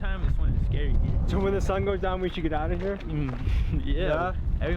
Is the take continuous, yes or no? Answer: no